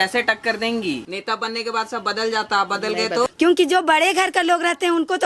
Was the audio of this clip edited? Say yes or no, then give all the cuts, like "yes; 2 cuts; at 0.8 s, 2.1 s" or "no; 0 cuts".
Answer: yes; 2 cuts; at 1.1 s, 3.3 s